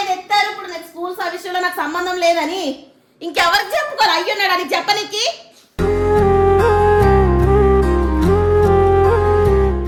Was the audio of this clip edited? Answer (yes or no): no